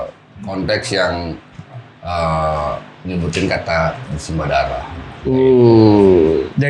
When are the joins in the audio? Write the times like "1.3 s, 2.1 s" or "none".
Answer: none